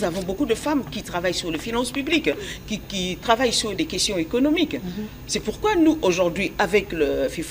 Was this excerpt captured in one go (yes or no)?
yes